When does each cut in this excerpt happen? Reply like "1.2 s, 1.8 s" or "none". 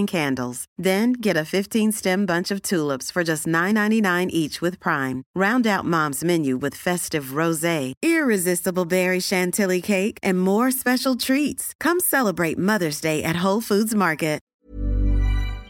14.5 s